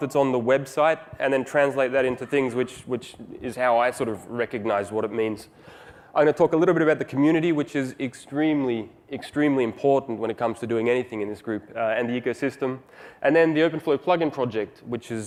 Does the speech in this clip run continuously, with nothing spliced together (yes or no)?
yes